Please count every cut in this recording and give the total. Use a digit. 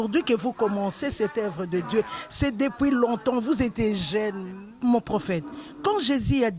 1